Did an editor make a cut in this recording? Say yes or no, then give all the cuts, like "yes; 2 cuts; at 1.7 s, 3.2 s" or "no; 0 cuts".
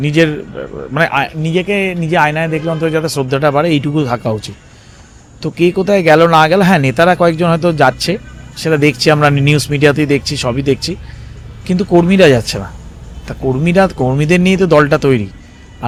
no; 0 cuts